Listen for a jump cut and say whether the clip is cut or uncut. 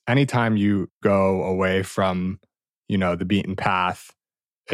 cut